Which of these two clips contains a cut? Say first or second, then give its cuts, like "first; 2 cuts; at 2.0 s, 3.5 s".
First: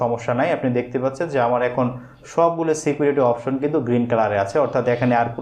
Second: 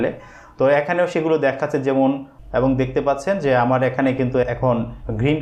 second; 1 cut; at 2.3 s